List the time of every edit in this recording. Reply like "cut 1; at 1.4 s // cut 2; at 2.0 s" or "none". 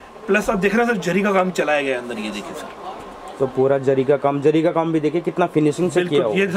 none